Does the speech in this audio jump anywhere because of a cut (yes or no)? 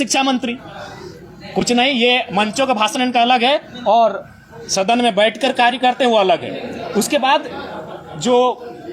no